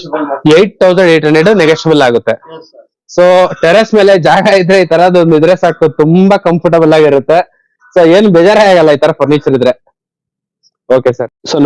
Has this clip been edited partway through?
no; 0 cuts

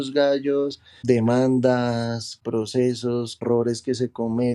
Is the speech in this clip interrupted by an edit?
yes; 3 cuts; at 1.0 s, 2.3 s, 3.4 s

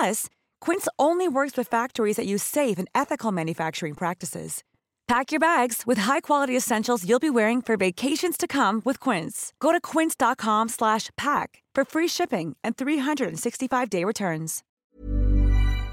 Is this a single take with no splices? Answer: no; 1 cut; at 14.7 s

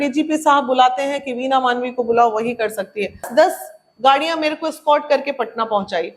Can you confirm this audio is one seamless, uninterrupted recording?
no; 1 cut; at 3.3 s

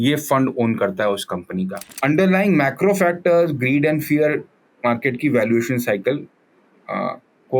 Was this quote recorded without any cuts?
no; 1 cut; at 1.9 s

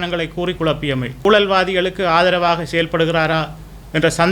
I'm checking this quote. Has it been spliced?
yes; 1 cut; at 1.2 s

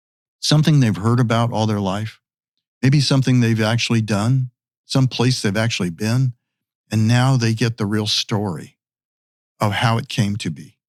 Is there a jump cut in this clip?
no; 0 cuts

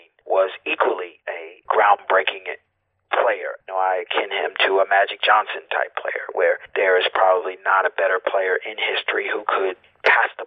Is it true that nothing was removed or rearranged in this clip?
no; 3 cuts; at 1.5 s, 3.6 s, 6.7 s

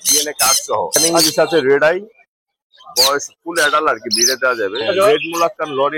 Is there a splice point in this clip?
yes; 2 cuts; at 1.0 s, 4.8 s

